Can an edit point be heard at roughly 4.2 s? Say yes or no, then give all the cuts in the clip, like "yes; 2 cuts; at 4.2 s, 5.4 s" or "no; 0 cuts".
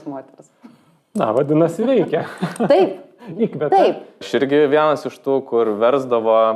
yes; 1 cut; at 4.2 s